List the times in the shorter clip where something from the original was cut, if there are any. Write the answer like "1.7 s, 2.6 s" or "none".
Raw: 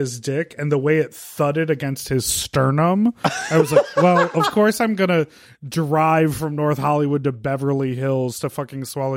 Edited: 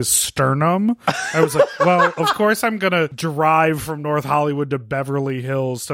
3.2 s

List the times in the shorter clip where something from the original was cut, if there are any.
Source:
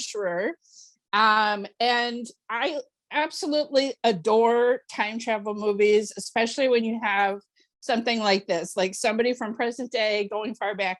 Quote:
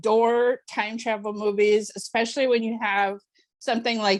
none

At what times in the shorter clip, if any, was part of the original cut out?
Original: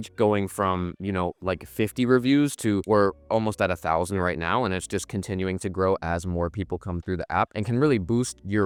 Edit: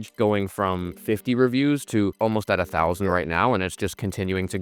0.9 s, 2.1 s

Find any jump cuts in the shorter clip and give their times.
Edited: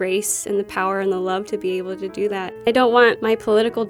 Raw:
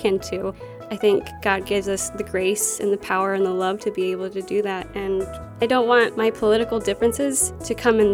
2.5 s

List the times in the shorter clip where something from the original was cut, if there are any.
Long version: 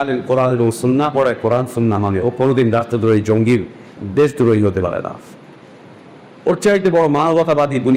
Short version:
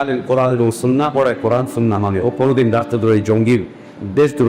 none

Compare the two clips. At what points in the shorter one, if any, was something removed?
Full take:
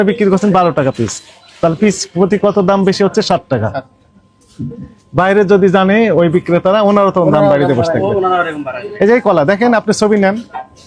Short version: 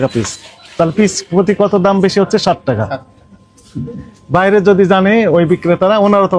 none

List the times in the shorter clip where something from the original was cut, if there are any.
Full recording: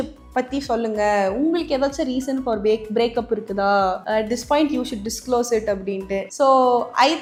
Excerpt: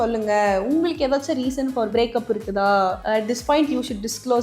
1.9 s

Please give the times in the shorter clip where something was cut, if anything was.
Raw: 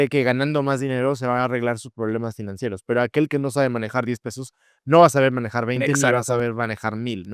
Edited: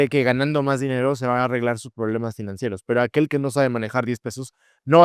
none

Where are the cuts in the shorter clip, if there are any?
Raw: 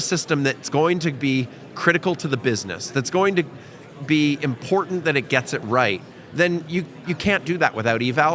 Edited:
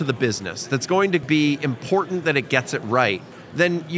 1.2 s

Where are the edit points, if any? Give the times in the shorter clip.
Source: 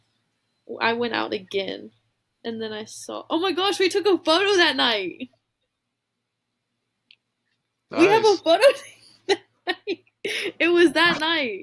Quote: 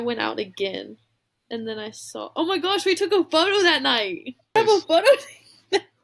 4.5 s

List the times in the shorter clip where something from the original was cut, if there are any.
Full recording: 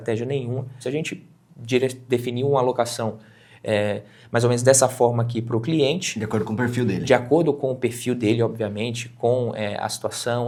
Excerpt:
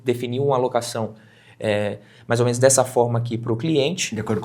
none

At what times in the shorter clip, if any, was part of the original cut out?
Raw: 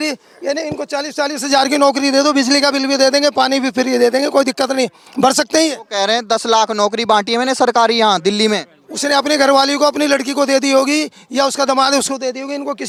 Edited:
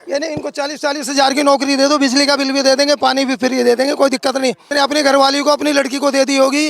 4.6 s

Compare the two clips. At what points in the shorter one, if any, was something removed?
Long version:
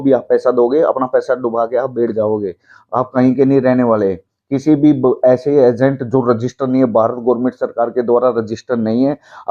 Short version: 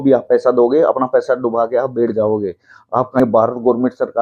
3.2 s

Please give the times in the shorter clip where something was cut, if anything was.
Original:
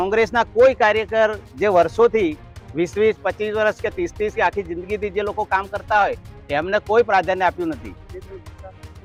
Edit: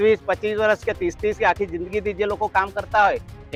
none

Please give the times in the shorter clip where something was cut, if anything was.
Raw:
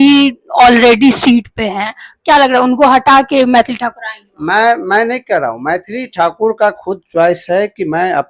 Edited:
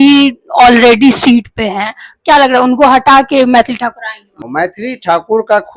4.4 s

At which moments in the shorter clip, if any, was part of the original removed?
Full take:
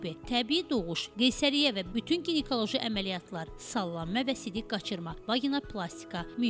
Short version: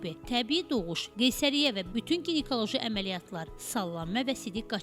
none

